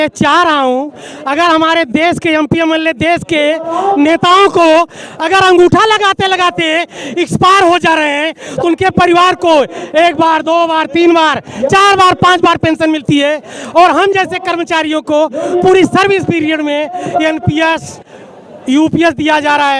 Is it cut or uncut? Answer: uncut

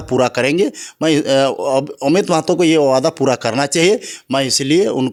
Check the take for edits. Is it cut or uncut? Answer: uncut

